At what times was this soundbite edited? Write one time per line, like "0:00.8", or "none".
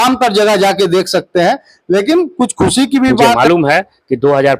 0:03.4